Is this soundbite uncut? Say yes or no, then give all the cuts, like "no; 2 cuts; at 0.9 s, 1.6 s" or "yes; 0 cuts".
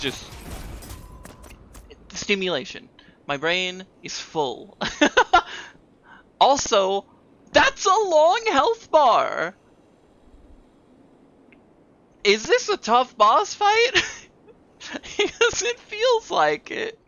yes; 0 cuts